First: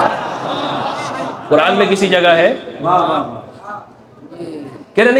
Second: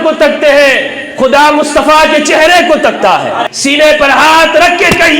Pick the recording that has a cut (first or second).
second